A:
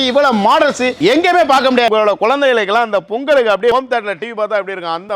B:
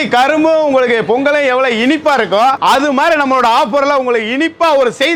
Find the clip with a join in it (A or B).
A